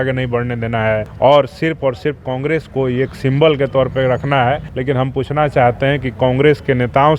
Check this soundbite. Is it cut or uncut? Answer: cut